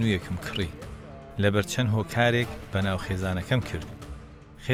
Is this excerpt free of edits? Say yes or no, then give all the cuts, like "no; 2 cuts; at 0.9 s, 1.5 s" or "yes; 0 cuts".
yes; 0 cuts